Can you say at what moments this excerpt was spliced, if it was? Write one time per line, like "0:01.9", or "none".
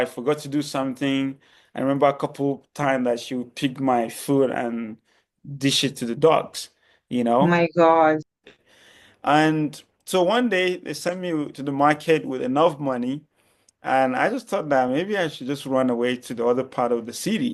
none